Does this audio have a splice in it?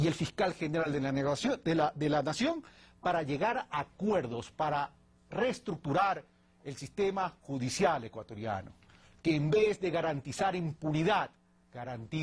no; 0 cuts

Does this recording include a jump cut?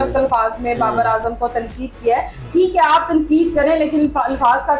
no; 0 cuts

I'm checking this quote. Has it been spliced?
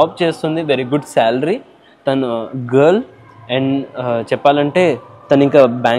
no; 0 cuts

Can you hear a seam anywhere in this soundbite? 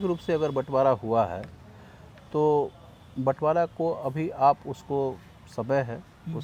no; 0 cuts

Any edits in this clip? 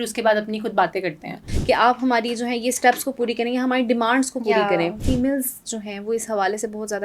yes; 2 cuts; at 1.5 s, 5.0 s

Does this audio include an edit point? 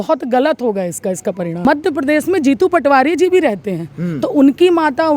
yes; 1 cut; at 1.6 s

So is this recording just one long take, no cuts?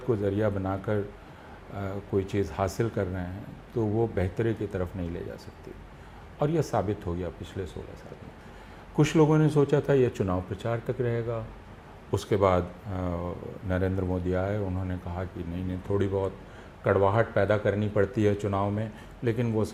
yes; 0 cuts

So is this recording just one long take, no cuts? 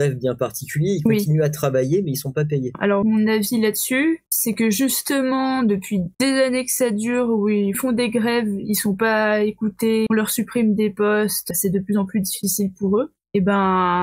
no; 6 cuts; at 2.7 s, 4.3 s, 6.1 s, 7.8 s, 10.1 s, 11.5 s

